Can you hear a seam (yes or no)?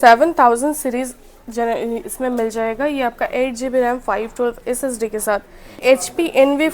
yes